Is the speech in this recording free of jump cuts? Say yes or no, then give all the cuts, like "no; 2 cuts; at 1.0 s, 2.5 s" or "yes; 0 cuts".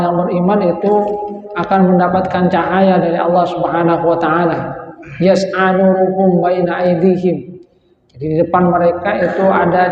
yes; 0 cuts